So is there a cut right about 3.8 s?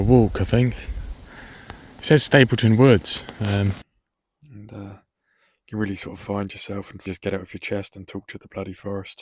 yes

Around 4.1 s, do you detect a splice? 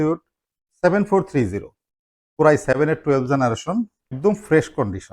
yes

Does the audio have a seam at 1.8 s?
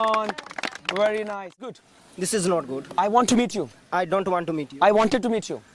yes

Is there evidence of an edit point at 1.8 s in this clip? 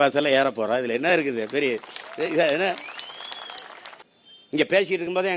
no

